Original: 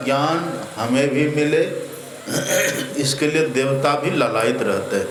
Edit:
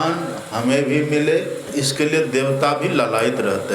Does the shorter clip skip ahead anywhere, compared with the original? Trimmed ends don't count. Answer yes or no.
yes